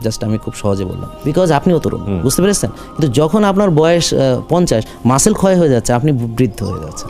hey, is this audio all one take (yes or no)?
no